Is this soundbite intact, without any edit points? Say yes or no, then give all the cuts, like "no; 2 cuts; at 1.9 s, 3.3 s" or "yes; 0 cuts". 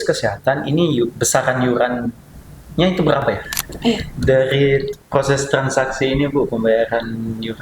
no; 1 cut; at 4.1 s